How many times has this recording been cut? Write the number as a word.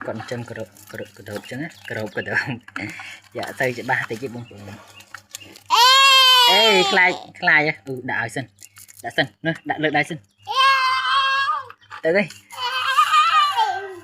one